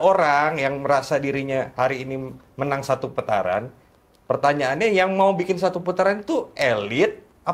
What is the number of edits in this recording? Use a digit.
0